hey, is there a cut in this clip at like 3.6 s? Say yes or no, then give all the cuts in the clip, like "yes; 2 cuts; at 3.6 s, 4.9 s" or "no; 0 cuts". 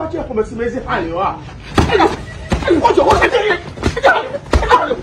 no; 0 cuts